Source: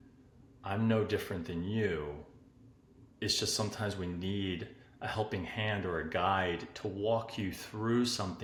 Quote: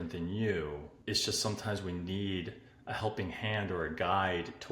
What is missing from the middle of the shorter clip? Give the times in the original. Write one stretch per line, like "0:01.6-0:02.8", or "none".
0:02.3-0:03.1